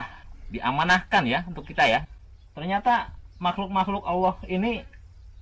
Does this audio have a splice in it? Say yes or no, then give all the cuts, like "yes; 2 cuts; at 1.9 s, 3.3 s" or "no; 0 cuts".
no; 0 cuts